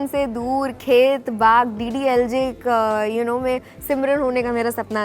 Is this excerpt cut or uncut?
uncut